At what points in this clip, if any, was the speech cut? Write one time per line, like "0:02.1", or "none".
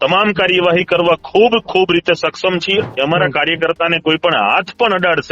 0:02.9